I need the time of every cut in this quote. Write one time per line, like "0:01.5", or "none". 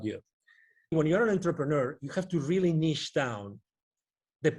0:00.9